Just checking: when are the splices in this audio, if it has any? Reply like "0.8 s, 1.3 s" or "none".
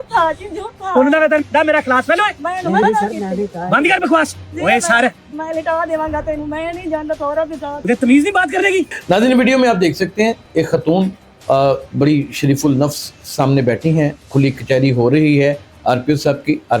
none